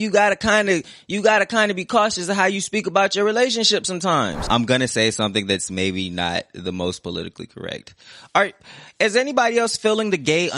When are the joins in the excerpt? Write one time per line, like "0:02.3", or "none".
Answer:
0:04.5